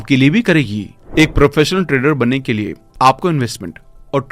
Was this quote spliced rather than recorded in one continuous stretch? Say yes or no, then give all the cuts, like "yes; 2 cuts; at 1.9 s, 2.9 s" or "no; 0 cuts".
yes; 1 cut; at 1.0 s